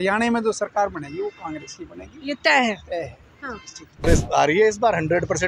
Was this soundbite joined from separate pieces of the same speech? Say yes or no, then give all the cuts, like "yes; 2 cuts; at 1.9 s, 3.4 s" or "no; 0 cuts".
yes; 1 cut; at 4.0 s